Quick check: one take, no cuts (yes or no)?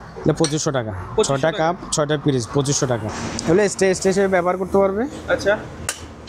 no